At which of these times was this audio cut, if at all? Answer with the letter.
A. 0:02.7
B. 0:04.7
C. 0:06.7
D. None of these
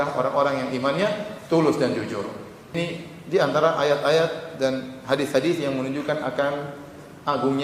A